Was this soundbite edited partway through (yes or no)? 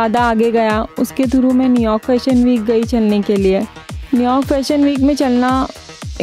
no